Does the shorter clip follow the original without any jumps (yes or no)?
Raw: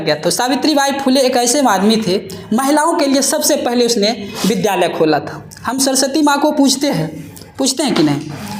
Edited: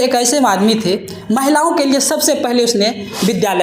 yes